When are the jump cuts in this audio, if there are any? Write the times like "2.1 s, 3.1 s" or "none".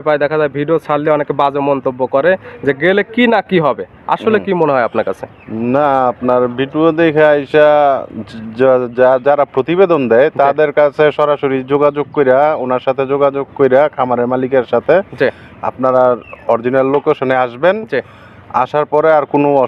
none

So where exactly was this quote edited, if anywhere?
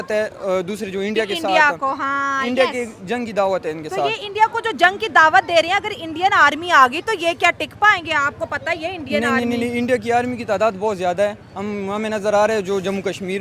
none

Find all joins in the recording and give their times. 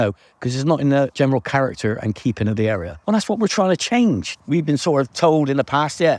1.1 s, 2.9 s, 4.3 s

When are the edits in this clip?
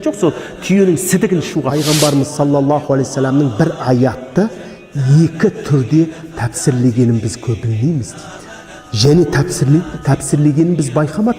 1.7 s

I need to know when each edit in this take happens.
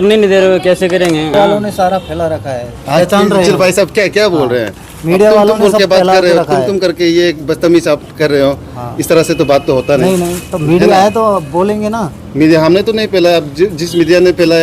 1.4 s

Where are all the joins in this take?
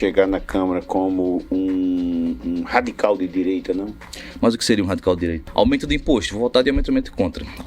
5.4 s

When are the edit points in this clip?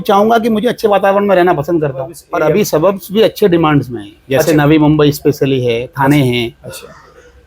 2.2 s

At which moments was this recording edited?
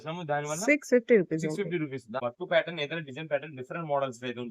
2.1 s

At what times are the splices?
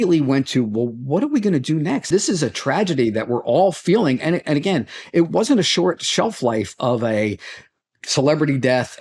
2.1 s, 5.3 s

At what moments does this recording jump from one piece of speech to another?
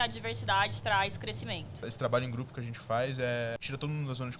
1.9 s, 3.6 s

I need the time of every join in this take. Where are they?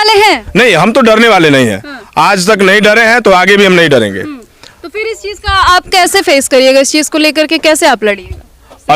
none

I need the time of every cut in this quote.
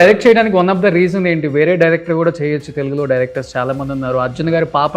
none

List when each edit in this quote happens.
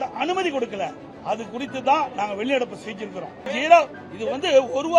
3.5 s

